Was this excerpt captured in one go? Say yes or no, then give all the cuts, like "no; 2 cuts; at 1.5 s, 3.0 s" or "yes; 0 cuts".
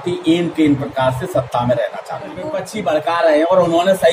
no; 1 cut; at 2.6 s